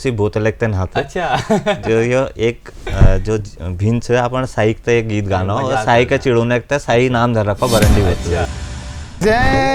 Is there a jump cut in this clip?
yes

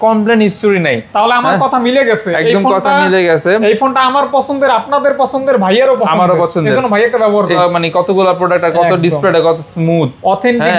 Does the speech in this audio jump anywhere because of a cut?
yes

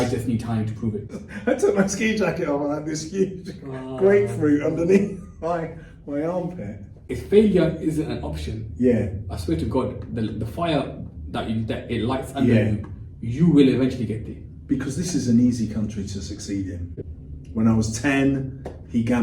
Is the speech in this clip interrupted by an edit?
yes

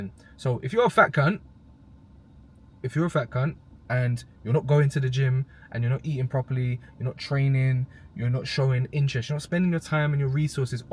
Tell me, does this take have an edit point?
no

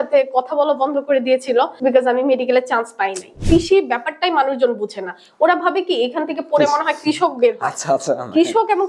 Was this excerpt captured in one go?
no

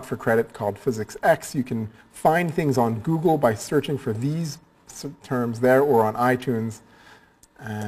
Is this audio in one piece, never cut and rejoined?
no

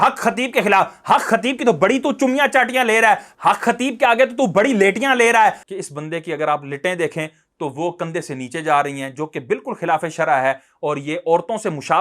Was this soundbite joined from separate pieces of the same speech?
yes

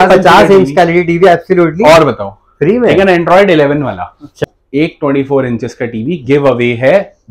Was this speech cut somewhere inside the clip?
yes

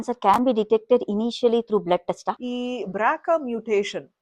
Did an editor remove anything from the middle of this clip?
yes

